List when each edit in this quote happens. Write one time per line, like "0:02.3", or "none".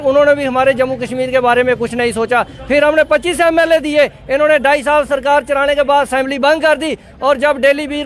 none